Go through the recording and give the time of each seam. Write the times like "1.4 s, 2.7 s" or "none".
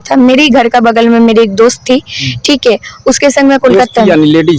none